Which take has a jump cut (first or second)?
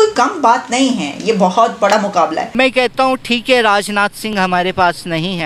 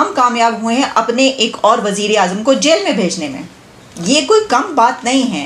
first